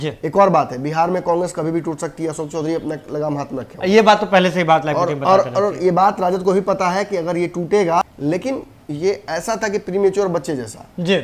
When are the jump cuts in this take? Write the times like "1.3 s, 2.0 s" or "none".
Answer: 8.0 s